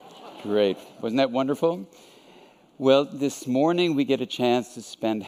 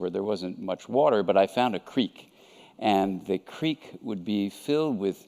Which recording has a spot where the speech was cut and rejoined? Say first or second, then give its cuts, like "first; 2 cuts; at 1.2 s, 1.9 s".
second; 1 cut; at 3.1 s